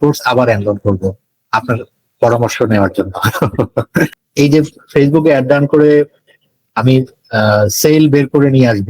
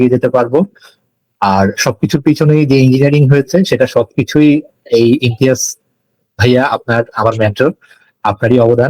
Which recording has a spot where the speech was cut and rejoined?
first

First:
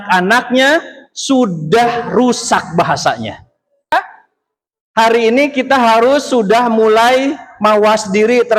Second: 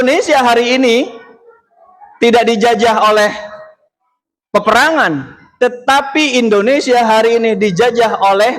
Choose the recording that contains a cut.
first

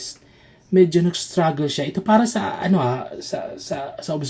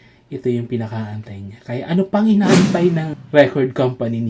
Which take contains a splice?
second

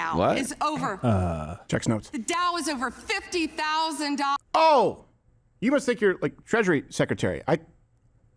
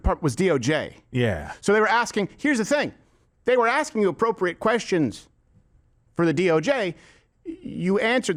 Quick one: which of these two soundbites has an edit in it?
first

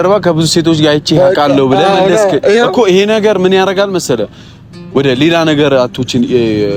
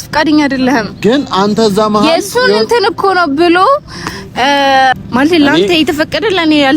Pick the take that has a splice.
second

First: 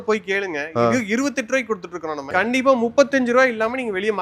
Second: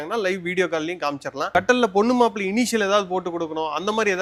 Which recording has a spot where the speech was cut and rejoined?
first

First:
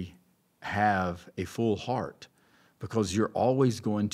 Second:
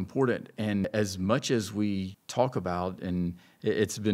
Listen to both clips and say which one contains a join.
second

